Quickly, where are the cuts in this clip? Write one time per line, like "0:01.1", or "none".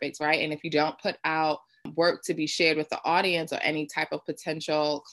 0:01.9